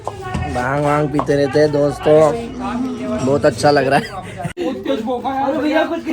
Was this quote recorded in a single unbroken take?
no; 1 cut; at 4.5 s

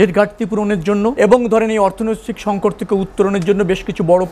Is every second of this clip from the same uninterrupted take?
no; 1 cut; at 1.1 s

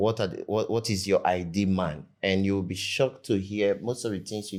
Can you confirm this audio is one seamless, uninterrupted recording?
yes; 0 cuts

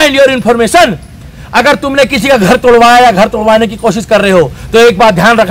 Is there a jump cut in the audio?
no; 0 cuts

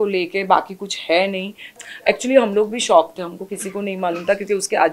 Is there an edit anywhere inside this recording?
yes; 1 cut; at 1.6 s

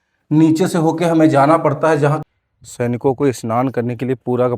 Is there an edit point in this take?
yes; 1 cut; at 2.2 s

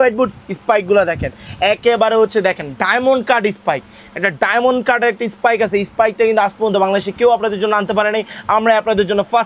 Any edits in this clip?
no; 0 cuts

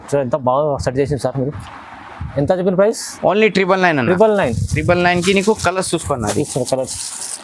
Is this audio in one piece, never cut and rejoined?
yes; 0 cuts

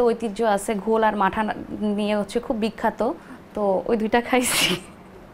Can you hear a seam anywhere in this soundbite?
no; 0 cuts

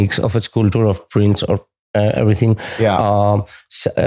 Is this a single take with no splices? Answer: yes; 0 cuts

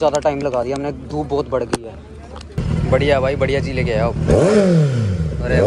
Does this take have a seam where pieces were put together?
yes; 1 cut; at 2.6 s

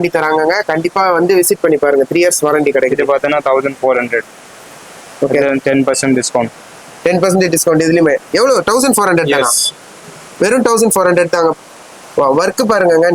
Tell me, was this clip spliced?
no; 0 cuts

